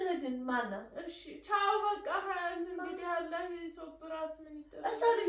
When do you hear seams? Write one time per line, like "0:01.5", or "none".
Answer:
none